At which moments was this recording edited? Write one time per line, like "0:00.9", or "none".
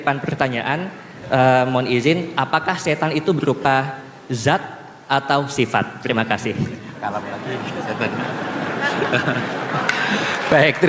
none